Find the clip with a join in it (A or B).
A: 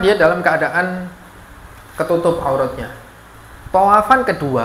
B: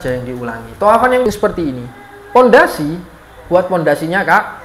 B